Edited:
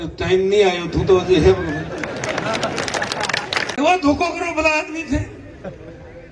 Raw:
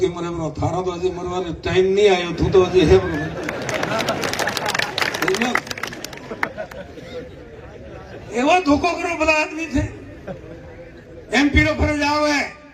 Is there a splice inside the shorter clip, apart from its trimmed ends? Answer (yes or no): yes